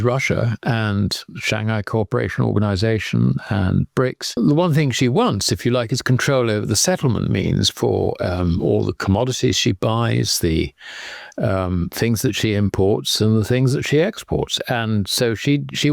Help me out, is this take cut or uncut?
cut